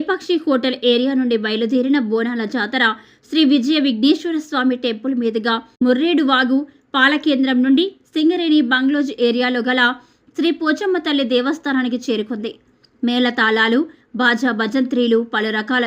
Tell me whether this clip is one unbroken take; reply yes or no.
no